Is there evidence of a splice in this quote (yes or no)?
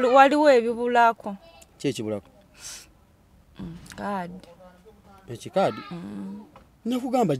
no